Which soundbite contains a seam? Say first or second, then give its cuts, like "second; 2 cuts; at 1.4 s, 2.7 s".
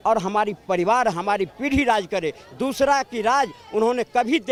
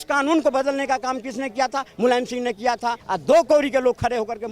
second; 1 cut; at 3.1 s